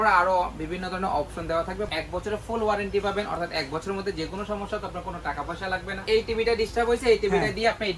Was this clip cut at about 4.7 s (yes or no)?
no